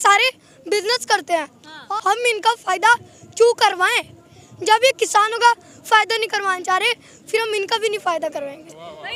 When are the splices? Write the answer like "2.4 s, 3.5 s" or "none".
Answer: 1.8 s